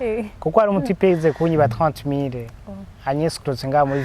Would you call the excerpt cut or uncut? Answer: uncut